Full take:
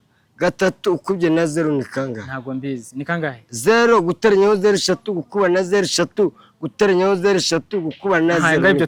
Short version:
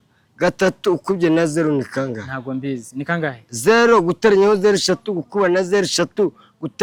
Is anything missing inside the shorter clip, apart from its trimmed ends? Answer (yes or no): no